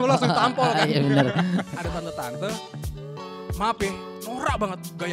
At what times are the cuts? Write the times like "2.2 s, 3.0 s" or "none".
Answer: 1.7 s